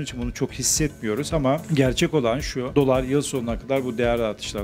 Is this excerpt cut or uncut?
cut